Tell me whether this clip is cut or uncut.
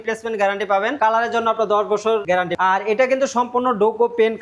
cut